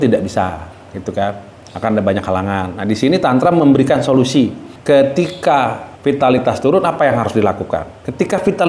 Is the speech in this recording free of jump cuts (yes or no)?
no